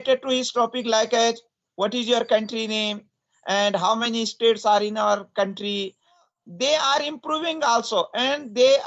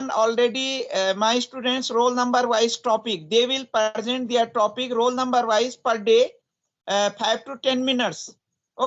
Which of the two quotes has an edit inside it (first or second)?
first